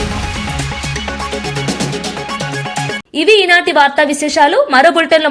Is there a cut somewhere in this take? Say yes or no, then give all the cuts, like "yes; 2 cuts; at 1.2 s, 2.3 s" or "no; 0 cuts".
no; 0 cuts